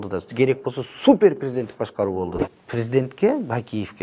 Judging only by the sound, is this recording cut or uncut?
cut